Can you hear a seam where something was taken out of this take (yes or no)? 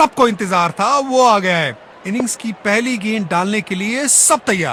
no